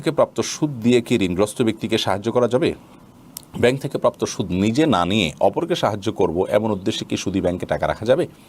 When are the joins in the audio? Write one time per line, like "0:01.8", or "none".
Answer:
none

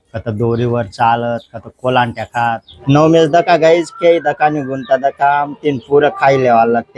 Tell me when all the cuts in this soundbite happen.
0:02.8

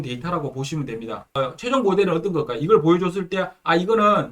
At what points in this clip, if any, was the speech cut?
0:01.4

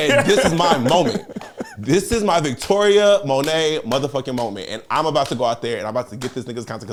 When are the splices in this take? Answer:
none

